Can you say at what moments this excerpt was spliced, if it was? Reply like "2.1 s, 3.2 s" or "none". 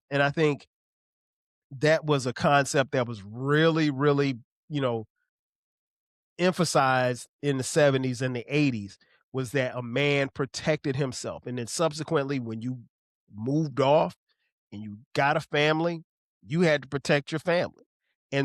none